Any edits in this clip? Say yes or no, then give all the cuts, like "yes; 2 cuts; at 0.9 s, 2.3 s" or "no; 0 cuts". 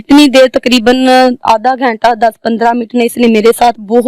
no; 0 cuts